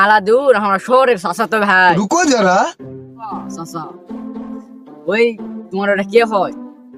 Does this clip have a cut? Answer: no; 0 cuts

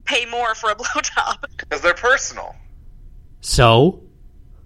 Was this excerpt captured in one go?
no; 1 cut; at 1.5 s

